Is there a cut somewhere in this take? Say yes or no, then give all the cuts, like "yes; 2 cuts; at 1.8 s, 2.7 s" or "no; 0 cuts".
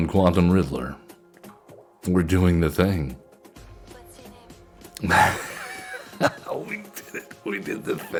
no; 0 cuts